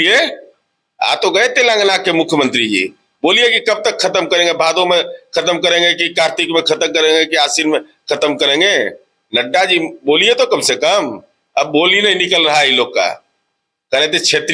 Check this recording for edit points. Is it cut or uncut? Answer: uncut